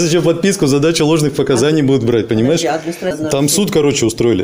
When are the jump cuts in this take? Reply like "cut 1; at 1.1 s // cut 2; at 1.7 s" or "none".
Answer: cut 1; at 3.2 s